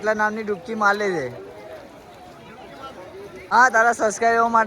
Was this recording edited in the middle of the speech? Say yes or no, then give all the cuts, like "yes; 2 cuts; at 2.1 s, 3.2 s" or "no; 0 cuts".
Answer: yes; 1 cut; at 3.5 s